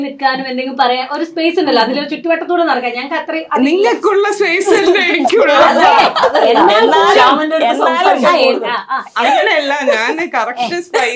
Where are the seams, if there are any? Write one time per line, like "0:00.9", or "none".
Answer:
none